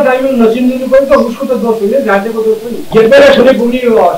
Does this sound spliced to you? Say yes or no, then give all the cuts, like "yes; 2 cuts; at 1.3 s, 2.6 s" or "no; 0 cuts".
yes; 1 cut; at 2.7 s